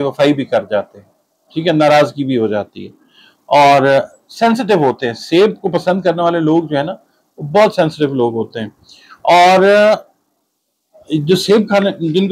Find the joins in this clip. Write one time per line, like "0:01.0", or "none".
none